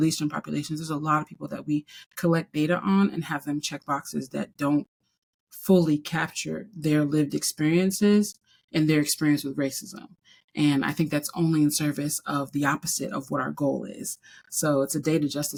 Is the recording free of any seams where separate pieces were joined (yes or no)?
yes